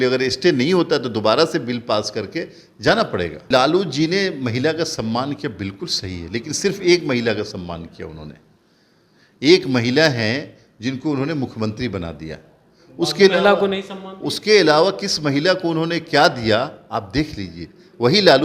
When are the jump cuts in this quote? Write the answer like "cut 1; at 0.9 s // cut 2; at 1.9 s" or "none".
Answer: cut 1; at 3.5 s